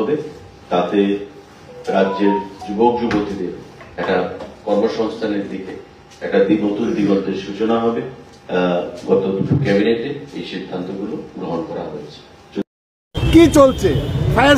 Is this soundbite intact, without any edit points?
no; 1 cut; at 12.8 s

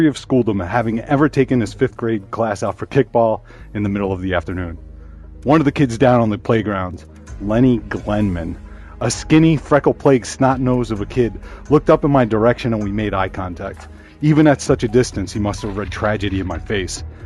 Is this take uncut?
yes; 0 cuts

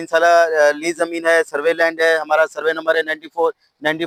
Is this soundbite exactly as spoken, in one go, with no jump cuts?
yes; 0 cuts

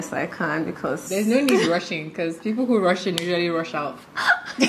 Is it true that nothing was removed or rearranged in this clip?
no; 1 cut; at 1.0 s

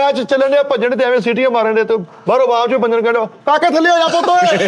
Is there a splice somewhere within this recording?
no; 0 cuts

